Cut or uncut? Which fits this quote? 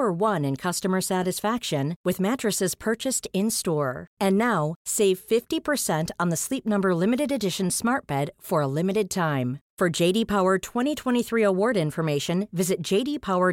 uncut